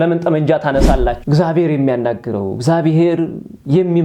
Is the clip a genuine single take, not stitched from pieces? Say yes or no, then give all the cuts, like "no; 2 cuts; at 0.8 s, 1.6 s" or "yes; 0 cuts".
no; 1 cut; at 1.2 s